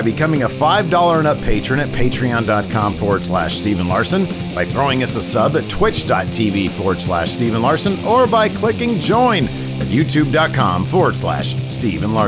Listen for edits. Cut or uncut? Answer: uncut